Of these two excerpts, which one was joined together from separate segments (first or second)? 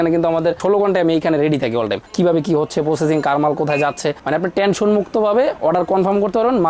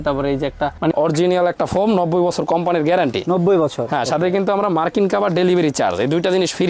second